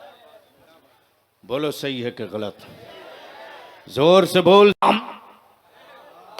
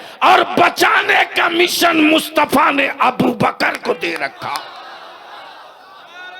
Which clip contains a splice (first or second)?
first